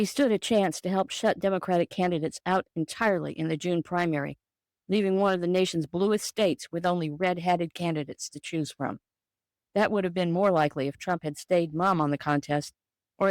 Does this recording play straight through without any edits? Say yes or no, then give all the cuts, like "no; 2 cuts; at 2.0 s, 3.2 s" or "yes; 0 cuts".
no; 2 cuts; at 7.7 s, 11.7 s